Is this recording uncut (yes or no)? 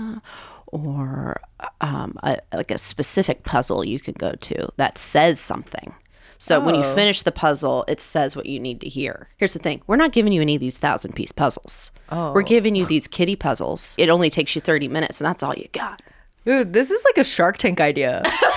no